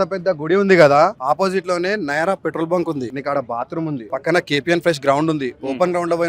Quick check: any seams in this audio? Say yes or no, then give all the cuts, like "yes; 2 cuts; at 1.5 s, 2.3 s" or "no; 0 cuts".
yes; 3 cuts; at 1.2 s, 3.1 s, 4.1 s